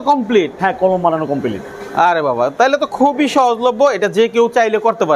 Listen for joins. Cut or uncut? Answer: uncut